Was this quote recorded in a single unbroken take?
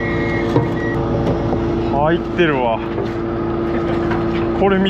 no; 1 cut; at 1.0 s

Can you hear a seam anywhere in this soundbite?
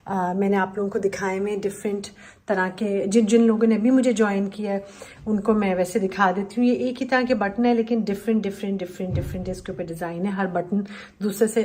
no; 0 cuts

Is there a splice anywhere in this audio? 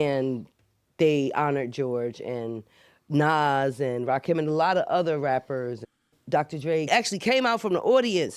yes; 2 cuts; at 5.8 s, 6.9 s

